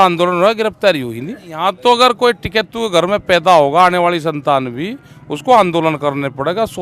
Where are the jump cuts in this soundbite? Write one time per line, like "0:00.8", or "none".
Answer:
0:01.7